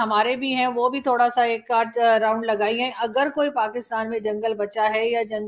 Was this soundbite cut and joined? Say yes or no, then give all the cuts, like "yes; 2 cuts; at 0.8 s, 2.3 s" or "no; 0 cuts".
no; 0 cuts